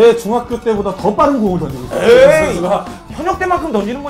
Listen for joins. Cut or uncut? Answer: uncut